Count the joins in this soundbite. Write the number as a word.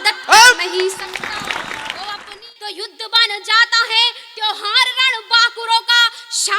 one